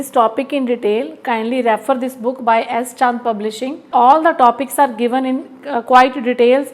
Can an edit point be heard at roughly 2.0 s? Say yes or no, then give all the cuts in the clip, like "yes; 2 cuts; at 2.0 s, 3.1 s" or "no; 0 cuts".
no; 1 cut; at 3.7 s